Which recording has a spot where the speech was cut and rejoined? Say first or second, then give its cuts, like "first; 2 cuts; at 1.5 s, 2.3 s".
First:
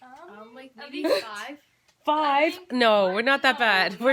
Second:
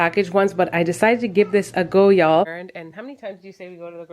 second; 1 cut; at 2.5 s